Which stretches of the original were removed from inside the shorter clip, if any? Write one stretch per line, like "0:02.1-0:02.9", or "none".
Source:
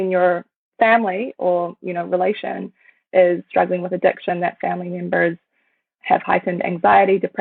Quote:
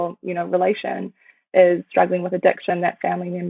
none